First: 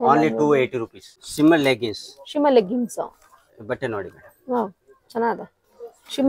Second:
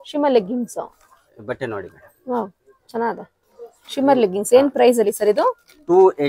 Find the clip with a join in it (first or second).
first